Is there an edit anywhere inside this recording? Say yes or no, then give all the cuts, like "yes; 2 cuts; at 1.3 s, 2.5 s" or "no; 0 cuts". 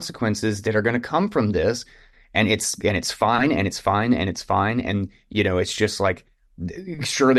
no; 0 cuts